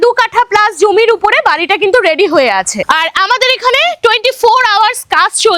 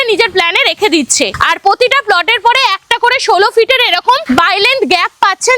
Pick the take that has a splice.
second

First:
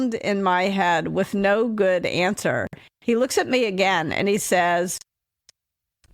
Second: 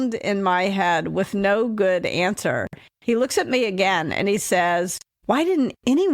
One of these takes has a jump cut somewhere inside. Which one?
second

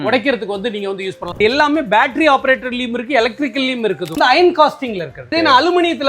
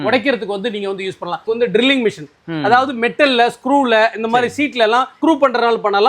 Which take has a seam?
first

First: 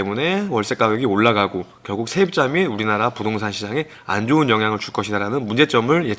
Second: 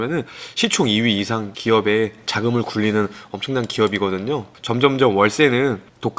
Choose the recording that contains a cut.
second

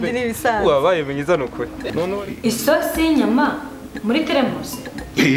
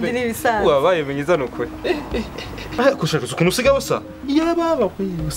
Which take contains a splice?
first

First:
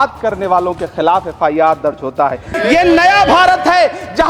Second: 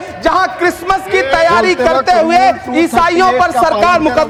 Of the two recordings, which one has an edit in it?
first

